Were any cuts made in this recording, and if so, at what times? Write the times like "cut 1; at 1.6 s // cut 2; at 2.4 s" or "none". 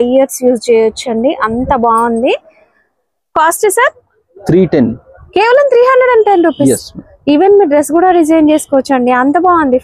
none